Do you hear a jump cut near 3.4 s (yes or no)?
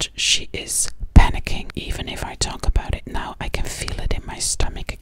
no